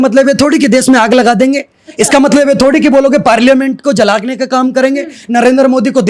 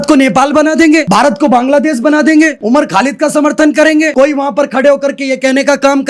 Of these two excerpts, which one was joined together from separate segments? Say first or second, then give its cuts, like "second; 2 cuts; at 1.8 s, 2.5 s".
second; 3 cuts; at 1.1 s, 2.6 s, 4.1 s